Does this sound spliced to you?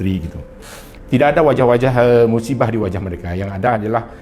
yes; 1 cut; at 0.9 s

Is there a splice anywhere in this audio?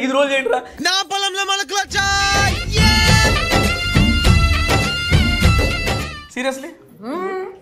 no; 0 cuts

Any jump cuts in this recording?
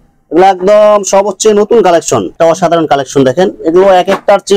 yes; 1 cut; at 2.3 s

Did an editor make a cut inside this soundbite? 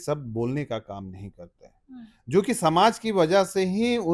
no; 0 cuts

